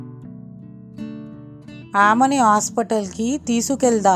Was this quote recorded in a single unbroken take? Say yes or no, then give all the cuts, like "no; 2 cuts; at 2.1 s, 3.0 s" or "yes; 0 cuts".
no; 1 cut; at 1.3 s